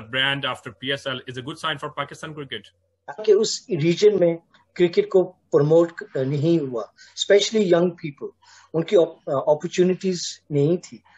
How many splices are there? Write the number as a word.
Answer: one